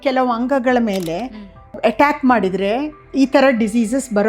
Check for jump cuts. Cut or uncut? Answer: cut